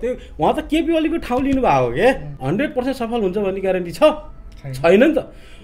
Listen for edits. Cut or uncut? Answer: cut